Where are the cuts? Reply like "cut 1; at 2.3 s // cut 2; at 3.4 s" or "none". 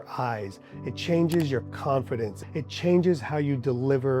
cut 1; at 2.4 s